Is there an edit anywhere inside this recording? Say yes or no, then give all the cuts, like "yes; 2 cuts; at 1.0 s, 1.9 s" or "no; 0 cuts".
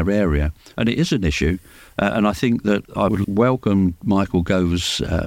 no; 0 cuts